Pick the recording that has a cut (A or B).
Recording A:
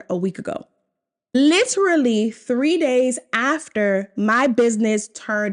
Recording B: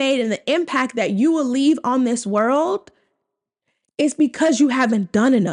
A